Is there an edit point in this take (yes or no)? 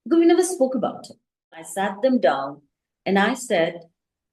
yes